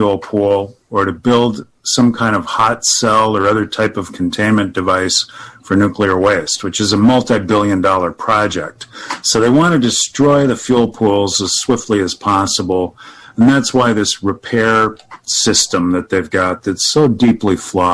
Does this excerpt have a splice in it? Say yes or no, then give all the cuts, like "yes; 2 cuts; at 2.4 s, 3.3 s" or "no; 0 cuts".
no; 0 cuts